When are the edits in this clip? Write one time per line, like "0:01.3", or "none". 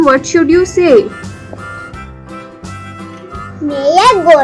0:01.5
0:03.1